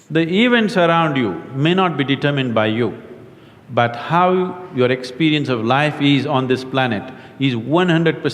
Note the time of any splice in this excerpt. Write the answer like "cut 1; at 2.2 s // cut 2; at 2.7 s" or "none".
none

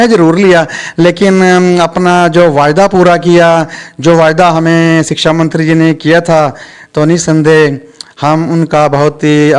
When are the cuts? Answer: none

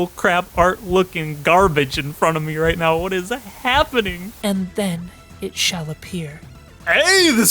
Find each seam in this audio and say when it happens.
cut 1; at 4.3 s

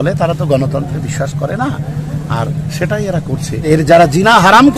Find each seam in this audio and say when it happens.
cut 1; at 3.6 s

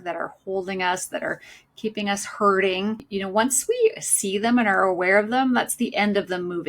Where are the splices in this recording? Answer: cut 1; at 3.1 s

